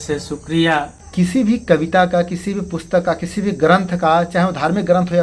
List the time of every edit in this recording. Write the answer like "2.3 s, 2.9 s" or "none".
1.0 s